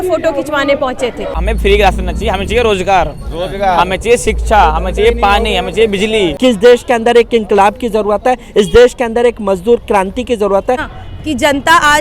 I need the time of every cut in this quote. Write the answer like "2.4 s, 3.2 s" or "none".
1.4 s, 6.3 s, 10.9 s